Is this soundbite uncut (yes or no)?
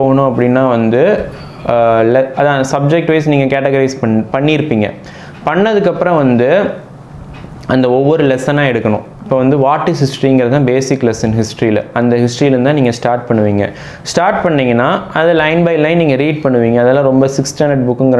yes